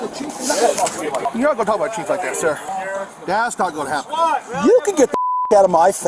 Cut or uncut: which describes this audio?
cut